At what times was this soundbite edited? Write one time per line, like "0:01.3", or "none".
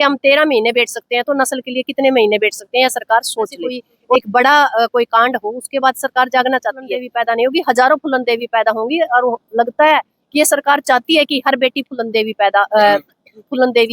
0:04.1
0:07.1